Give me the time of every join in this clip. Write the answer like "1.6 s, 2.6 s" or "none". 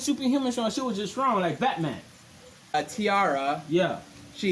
2.7 s

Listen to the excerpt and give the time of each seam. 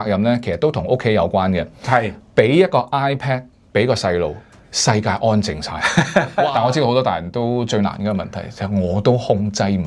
6.5 s

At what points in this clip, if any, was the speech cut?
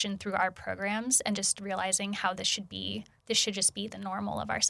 3.1 s

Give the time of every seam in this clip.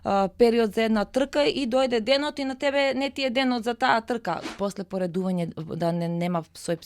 4.6 s

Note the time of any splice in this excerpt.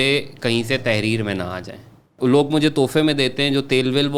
2.1 s

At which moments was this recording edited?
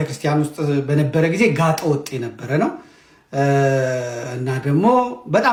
none

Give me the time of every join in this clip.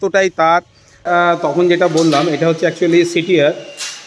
1.0 s

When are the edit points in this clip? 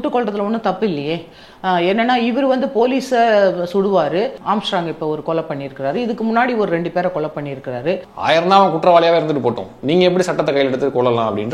4.4 s, 8.1 s

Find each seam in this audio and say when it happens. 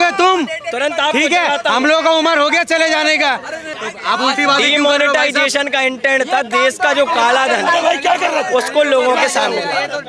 3.6 s

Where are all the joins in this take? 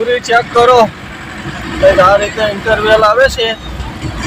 none

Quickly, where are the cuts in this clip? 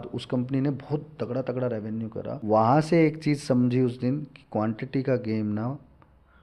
2.4 s

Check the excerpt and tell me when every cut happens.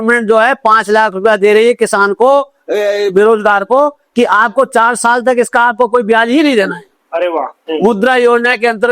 7.6 s

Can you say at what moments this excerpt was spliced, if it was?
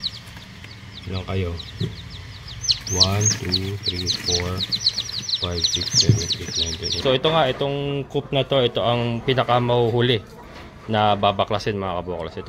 7.0 s

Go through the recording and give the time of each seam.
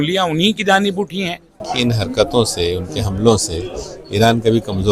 1.6 s

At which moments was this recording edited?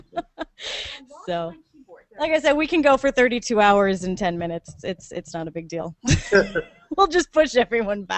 4.5 s

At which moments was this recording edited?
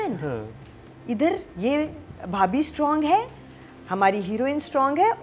none

